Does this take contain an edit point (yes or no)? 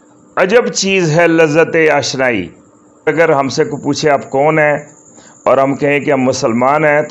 yes